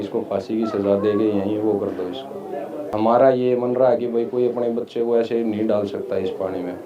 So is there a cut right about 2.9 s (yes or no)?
yes